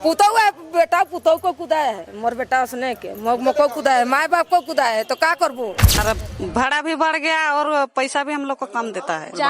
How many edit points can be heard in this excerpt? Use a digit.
1